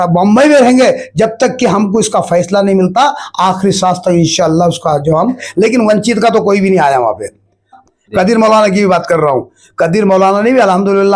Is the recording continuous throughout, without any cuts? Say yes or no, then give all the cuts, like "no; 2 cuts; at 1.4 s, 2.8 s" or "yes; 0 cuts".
no; 2 cuts; at 5.4 s, 7.8 s